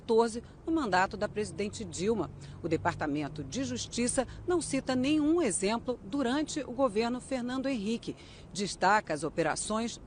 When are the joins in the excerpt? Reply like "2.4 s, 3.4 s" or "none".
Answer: 1.0 s